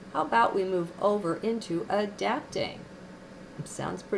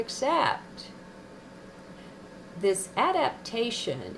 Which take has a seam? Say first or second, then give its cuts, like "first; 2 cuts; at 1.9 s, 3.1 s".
first; 1 cut; at 1.8 s